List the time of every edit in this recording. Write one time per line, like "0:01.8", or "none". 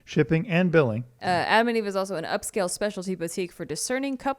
0:01.1